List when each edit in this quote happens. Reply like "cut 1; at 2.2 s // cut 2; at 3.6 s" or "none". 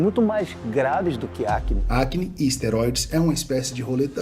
cut 1; at 1.8 s